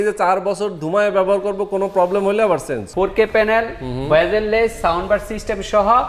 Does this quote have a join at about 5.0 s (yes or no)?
no